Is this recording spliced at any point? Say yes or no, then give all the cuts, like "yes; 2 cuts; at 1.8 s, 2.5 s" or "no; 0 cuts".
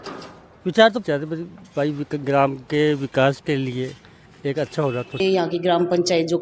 yes; 2 cuts; at 1.0 s, 5.2 s